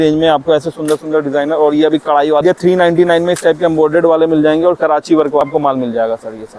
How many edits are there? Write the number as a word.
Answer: two